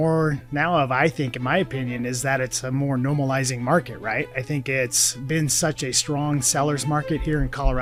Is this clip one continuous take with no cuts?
yes; 0 cuts

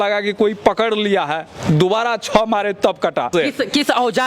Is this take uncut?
no; 1 cut; at 3.3 s

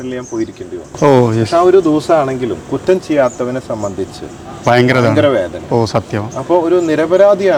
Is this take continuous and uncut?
yes; 0 cuts

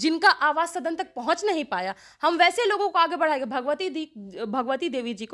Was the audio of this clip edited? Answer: no; 0 cuts

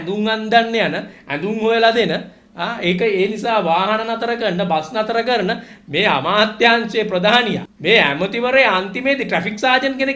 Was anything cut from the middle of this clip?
no; 0 cuts

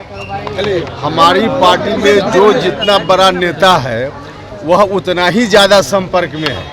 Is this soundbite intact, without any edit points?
yes; 0 cuts

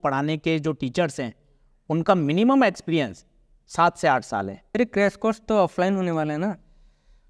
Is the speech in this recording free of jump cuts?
no; 1 cut; at 4.6 s

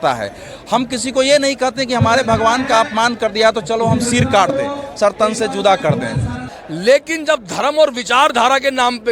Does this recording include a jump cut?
yes; 1 cut; at 6.4 s

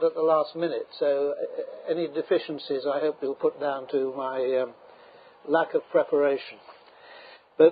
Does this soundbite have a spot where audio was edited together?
yes; 1 cut; at 3.6 s

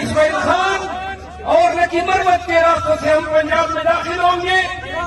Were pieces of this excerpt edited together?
no; 0 cuts

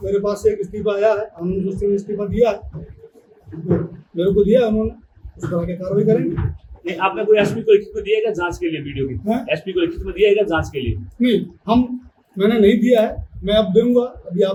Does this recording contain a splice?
no; 0 cuts

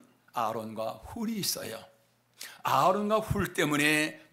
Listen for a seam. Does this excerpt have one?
no; 0 cuts

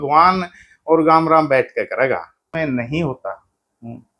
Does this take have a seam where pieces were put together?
yes; 1 cut; at 2.5 s

